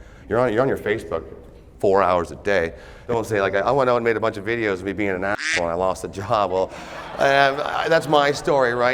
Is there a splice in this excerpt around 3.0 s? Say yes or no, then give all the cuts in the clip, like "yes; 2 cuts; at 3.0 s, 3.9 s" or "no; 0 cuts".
yes; 1 cut; at 3.0 s